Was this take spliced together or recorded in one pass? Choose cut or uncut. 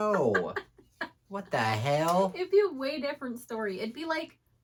uncut